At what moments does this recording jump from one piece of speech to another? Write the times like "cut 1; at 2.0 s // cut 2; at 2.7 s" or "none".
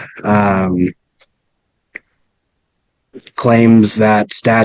none